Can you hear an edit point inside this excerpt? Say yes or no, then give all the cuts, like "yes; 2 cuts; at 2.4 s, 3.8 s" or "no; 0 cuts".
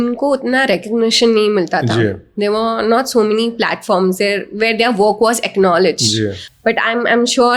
no; 0 cuts